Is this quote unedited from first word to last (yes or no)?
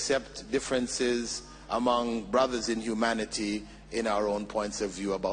yes